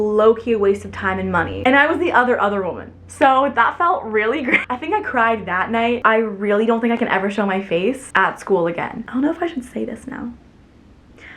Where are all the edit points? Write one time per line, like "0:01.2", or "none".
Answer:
0:01.6
0:04.7
0:06.0
0:09.0